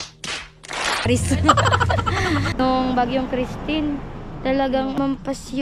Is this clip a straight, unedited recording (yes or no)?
no